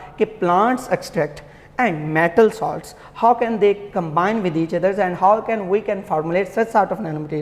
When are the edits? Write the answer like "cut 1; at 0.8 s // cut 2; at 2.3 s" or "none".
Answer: none